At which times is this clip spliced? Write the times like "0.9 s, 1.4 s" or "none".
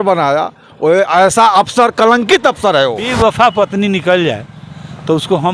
3.1 s